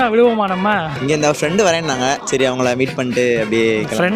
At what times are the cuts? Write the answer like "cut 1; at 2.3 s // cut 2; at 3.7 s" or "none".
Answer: cut 1; at 0.9 s // cut 2; at 2.2 s